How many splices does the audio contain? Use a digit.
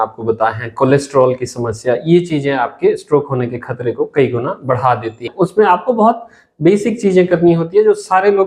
1